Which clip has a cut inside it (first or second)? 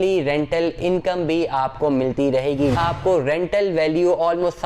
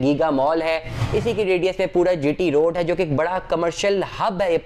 first